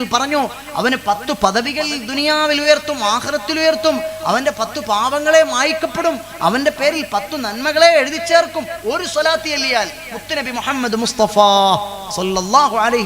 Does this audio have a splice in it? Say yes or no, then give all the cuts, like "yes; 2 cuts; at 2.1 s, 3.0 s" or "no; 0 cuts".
no; 0 cuts